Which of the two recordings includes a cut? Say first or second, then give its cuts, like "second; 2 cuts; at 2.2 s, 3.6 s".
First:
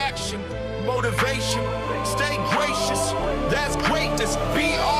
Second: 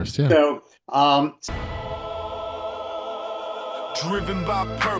second; 1 cut; at 1.4 s